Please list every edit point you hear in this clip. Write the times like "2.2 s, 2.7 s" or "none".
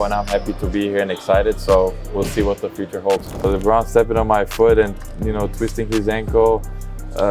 3.4 s